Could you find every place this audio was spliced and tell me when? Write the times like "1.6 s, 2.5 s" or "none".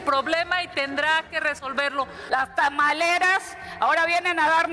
2.2 s